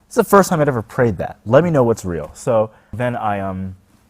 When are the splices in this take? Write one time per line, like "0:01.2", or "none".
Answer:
0:03.0